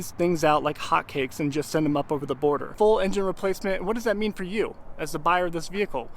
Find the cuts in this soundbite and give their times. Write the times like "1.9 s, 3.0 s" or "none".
2.7 s

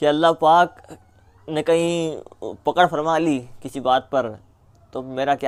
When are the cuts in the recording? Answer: none

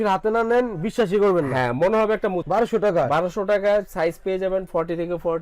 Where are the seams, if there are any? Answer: 2.4 s

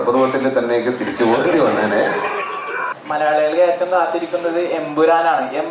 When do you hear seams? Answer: 2.9 s

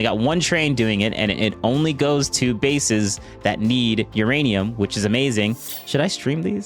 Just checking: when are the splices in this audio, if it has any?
5.7 s

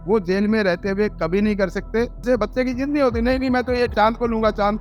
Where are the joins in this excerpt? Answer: 2.2 s, 3.9 s

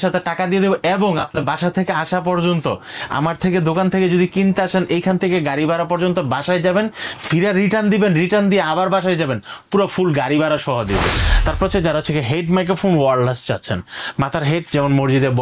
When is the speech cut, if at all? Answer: 11.2 s

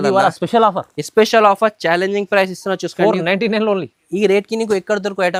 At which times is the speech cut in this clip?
none

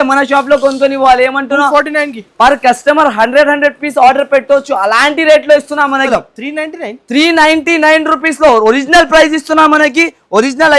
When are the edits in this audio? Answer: 6.1 s

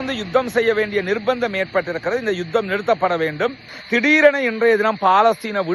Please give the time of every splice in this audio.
3.7 s

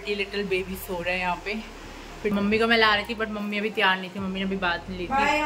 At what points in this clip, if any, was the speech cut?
2.3 s

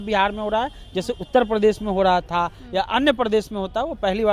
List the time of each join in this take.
none

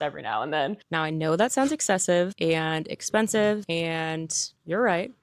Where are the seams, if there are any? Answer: 0.8 s, 2.3 s, 3.6 s

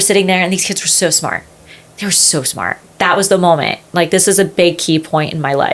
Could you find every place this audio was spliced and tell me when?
2.8 s

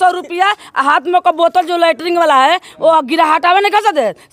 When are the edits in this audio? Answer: none

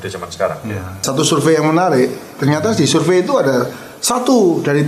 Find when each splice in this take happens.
1.1 s

